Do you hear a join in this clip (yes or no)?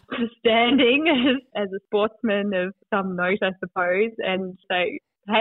yes